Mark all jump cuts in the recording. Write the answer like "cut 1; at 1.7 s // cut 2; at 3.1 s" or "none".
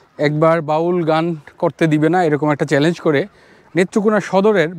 none